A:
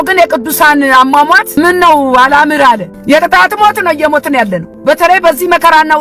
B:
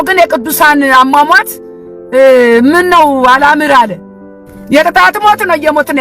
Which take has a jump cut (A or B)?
A